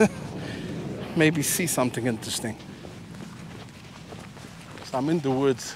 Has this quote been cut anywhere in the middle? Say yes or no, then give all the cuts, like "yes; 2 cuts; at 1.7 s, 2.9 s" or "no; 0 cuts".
no; 0 cuts